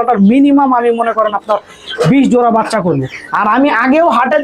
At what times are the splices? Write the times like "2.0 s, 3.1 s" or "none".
3.2 s